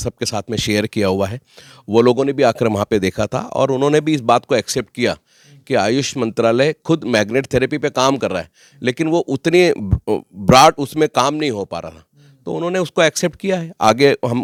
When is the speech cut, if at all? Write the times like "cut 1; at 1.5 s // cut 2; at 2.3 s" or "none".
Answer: none